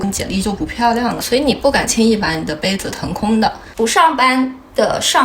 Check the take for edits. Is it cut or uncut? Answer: cut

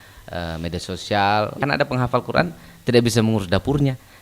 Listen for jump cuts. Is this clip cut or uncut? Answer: cut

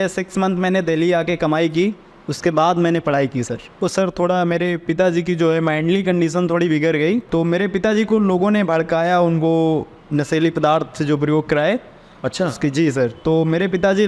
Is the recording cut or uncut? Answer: cut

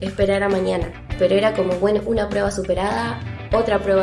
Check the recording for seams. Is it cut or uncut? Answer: cut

